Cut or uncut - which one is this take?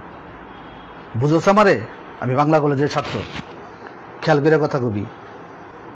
uncut